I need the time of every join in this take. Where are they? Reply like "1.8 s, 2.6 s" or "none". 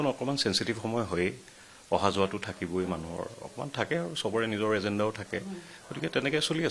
none